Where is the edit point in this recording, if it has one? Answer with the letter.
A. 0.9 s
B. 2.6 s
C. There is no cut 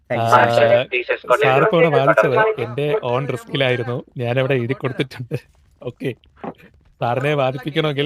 C